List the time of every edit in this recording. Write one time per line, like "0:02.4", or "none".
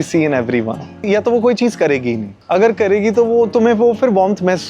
0:01.0
0:02.3